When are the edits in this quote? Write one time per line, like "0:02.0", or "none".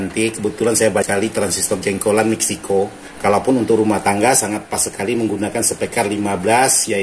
0:03.0